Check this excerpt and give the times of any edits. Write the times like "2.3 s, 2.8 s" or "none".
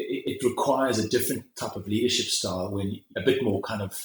3.1 s